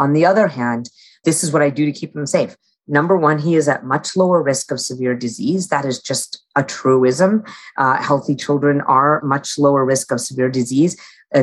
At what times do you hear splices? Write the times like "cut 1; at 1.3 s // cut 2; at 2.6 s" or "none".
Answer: cut 1; at 1.2 s // cut 2; at 9.2 s